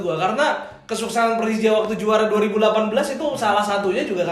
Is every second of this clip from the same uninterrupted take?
yes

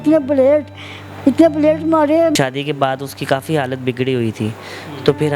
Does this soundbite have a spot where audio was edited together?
yes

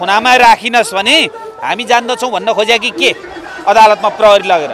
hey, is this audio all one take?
yes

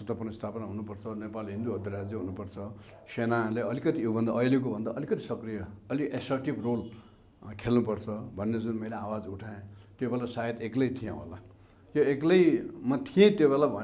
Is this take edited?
no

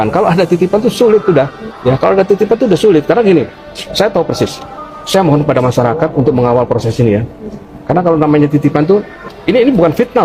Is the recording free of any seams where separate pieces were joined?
yes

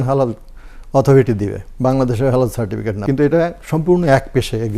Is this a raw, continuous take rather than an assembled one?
no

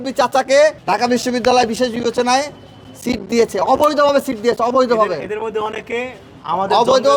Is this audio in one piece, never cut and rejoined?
yes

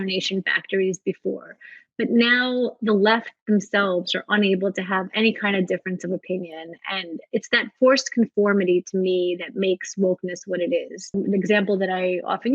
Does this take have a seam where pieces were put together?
yes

